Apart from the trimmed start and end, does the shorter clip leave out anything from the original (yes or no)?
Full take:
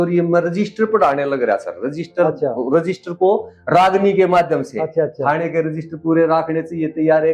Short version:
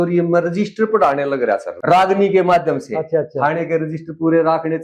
yes